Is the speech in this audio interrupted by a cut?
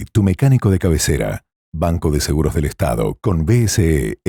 no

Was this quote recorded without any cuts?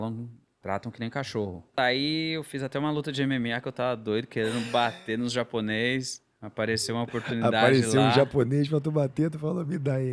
no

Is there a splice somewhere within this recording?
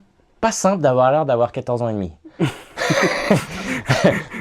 no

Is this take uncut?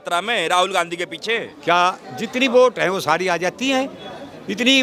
yes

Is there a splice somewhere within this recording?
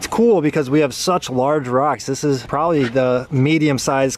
no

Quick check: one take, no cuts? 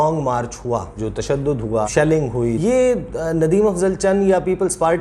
no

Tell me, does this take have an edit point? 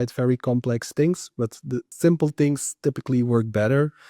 yes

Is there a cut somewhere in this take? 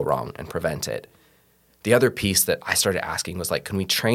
no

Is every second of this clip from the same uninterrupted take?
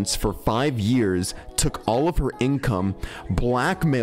yes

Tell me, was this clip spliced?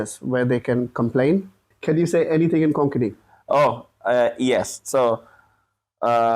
yes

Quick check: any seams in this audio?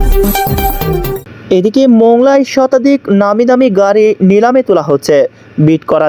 no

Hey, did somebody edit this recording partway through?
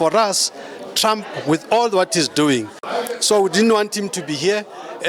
yes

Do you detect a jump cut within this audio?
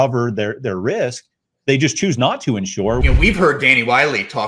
yes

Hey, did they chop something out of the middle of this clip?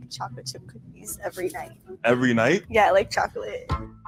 no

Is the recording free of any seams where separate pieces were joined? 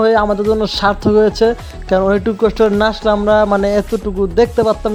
yes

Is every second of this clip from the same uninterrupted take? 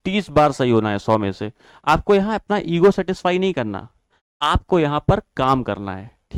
yes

